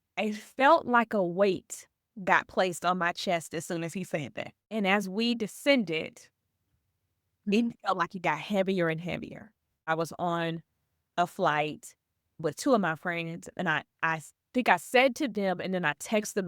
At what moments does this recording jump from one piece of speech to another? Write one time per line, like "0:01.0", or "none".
0:04.6
0:09.9
0:12.4